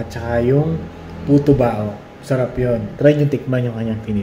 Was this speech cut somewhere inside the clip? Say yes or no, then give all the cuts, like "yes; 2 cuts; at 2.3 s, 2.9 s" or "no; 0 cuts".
yes; 1 cut; at 2.9 s